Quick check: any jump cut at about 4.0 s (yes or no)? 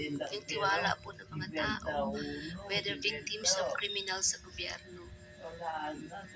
no